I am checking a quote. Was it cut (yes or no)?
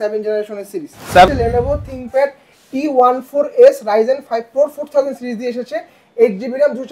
yes